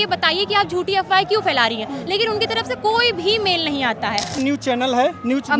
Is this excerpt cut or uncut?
cut